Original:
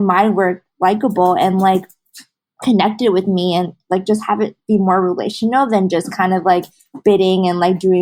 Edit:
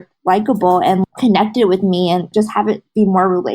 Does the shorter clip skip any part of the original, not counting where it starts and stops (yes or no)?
yes